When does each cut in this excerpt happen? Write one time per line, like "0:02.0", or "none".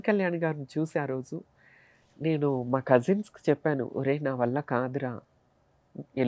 none